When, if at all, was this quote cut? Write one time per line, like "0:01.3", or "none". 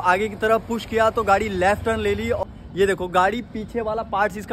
0:02.4

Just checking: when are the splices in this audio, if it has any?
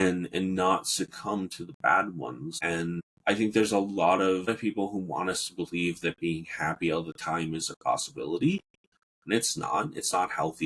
0:02.8
0:04.5

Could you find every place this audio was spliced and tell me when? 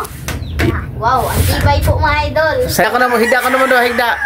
0:02.8

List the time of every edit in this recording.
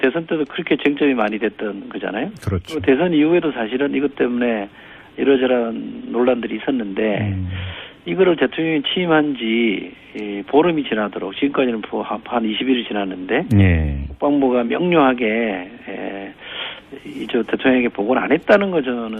0:17.8

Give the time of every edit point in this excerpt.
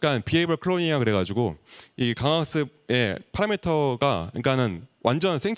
none

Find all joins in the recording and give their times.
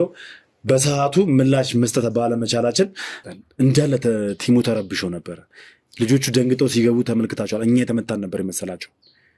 0:03.2

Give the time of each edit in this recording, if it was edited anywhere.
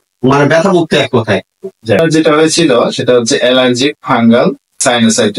0:02.0

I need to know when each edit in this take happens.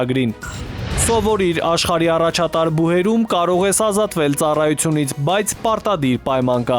none

